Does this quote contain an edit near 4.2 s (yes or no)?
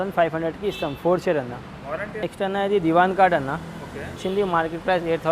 yes